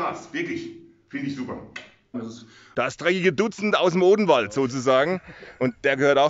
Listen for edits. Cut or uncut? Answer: cut